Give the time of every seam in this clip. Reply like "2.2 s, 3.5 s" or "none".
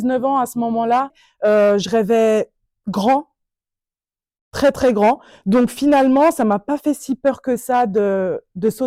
1.2 s